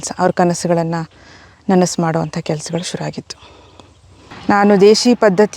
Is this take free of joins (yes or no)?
no